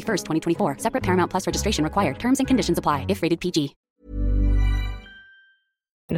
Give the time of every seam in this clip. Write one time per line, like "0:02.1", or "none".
none